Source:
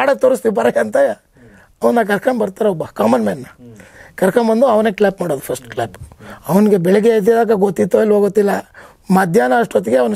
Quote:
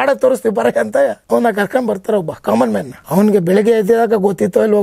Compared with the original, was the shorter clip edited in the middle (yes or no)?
yes